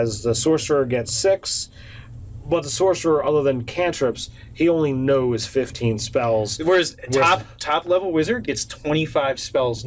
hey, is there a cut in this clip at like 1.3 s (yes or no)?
yes